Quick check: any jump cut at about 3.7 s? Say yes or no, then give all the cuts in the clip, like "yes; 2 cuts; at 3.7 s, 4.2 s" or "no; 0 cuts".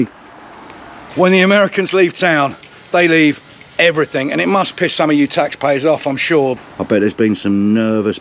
no; 2 cuts; at 1.0 s, 6.6 s